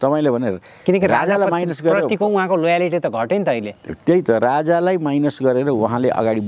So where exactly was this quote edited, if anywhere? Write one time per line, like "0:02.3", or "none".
none